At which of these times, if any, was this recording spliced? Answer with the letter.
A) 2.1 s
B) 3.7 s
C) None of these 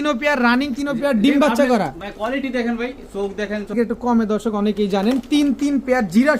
B